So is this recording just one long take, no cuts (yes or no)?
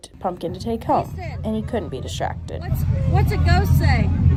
yes